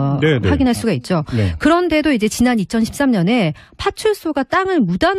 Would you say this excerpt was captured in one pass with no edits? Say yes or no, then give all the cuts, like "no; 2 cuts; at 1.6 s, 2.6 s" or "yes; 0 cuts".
no; 1 cut; at 3.8 s